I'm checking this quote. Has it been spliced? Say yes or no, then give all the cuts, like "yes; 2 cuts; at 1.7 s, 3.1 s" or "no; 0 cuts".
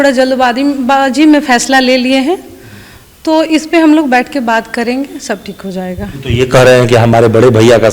no; 0 cuts